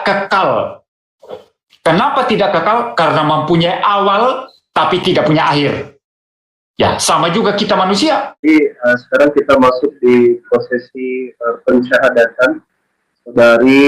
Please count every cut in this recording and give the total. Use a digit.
1